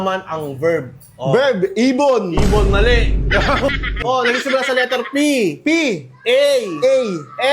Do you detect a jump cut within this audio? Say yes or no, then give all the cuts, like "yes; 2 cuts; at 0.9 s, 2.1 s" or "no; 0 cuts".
yes; 1 cut; at 4.0 s